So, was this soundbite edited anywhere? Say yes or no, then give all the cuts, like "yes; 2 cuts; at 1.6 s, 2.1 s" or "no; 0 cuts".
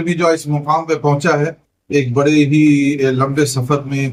no; 0 cuts